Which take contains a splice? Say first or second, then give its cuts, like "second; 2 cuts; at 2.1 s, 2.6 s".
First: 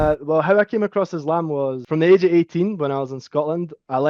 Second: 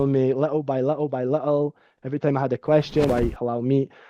second; 1 cut; at 3.1 s